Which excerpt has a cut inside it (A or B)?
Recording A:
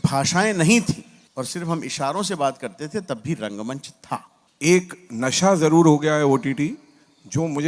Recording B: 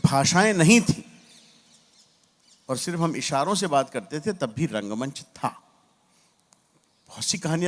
A